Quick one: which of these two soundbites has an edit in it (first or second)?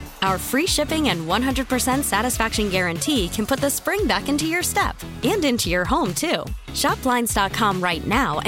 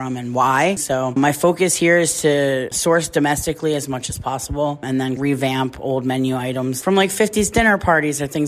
second